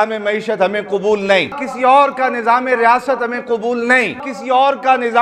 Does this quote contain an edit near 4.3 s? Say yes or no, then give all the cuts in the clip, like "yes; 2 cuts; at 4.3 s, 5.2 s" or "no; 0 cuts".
yes; 2 cuts; at 1.6 s, 4.3 s